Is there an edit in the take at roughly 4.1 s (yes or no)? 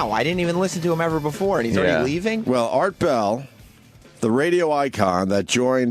yes